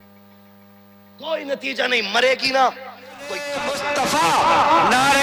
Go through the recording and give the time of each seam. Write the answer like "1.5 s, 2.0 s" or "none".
none